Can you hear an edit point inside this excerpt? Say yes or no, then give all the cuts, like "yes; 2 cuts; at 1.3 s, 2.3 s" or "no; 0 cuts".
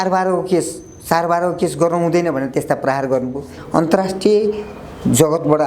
yes; 1 cut; at 3.6 s